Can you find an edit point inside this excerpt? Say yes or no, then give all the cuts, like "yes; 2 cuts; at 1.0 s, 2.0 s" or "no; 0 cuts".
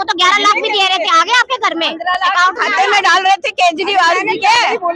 no; 0 cuts